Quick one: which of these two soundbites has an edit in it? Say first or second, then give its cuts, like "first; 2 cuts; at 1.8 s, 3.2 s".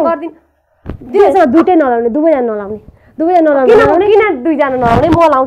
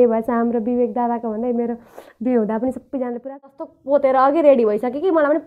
second; 1 cut; at 3.5 s